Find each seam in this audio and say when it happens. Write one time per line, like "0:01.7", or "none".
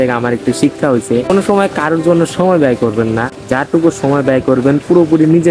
0:01.3
0:03.4